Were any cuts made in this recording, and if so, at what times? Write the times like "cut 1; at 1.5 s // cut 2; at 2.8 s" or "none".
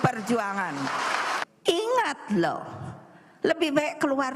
cut 1; at 1.4 s